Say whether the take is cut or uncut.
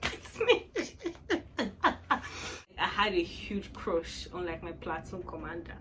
cut